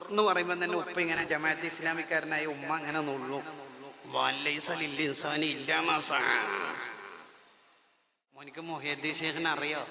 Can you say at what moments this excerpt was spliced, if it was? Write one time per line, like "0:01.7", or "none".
0:08.5